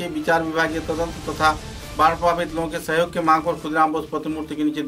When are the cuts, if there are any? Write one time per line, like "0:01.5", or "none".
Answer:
none